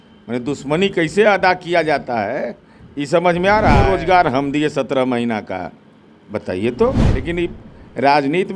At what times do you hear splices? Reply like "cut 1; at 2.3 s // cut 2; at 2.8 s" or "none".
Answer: cut 1; at 3.8 s // cut 2; at 7.1 s